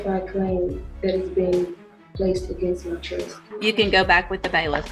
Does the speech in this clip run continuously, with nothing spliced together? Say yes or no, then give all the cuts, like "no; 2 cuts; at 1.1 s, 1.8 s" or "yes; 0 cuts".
no; 1 cut; at 3.4 s